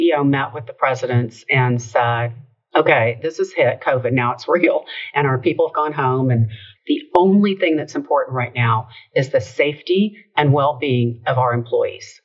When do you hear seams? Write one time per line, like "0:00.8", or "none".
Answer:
0:06.6